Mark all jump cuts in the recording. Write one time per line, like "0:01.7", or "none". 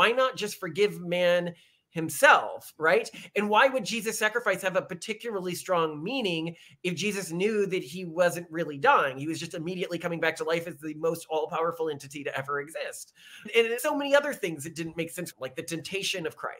0:15.3